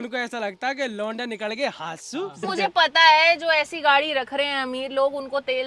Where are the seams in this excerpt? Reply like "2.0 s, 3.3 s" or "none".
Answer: 2.4 s